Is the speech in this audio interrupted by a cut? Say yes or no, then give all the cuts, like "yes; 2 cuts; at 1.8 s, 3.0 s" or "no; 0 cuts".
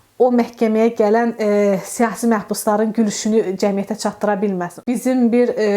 yes; 1 cut; at 4.7 s